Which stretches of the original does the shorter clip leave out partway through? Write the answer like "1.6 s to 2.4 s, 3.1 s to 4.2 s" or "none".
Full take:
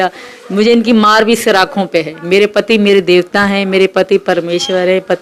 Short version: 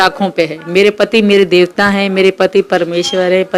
none